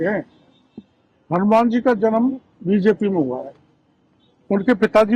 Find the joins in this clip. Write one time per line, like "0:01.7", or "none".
none